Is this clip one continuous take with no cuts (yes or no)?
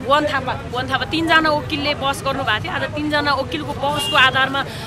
yes